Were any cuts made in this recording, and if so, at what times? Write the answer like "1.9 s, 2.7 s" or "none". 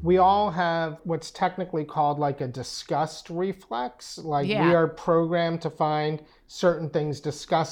1.0 s